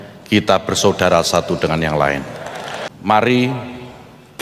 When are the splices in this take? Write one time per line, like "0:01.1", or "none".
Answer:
0:02.8